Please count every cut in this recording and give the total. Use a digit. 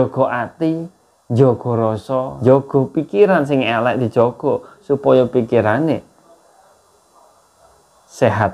1